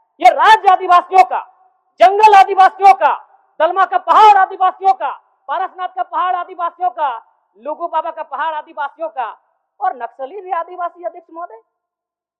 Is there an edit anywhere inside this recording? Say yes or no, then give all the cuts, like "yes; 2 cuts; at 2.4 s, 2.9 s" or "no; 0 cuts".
no; 0 cuts